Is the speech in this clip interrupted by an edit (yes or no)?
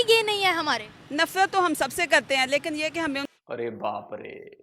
no